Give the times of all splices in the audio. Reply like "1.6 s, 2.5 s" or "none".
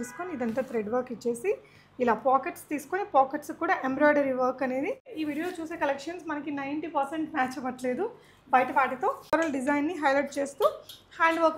5.1 s, 9.3 s